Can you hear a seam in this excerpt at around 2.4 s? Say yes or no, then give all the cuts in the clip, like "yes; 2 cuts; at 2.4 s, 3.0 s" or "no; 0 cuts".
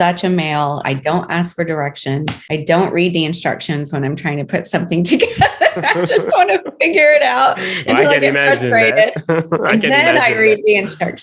yes; 2 cuts; at 0.8 s, 2.4 s